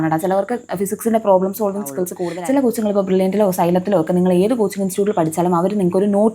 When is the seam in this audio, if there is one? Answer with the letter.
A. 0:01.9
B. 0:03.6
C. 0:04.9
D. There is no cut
A